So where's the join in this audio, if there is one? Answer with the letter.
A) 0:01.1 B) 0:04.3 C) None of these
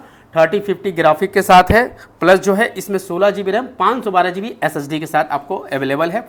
C